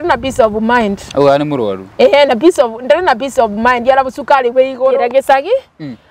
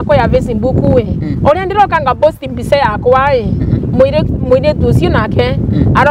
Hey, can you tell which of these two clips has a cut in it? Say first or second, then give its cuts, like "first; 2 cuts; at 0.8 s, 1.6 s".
first; 1 cut; at 4.9 s